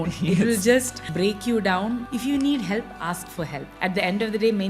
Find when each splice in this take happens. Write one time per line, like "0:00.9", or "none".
0:01.0
0:02.1
0:03.6